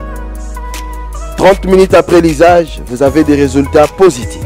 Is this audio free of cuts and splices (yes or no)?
no